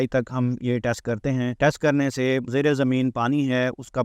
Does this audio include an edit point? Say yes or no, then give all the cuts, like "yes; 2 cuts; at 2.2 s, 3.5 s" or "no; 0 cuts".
yes; 2 cuts; at 1.5 s, 2.5 s